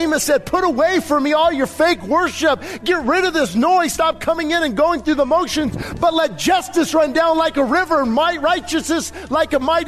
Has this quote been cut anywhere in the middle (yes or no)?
no